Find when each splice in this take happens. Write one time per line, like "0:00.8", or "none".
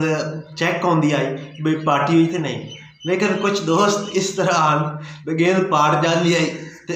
none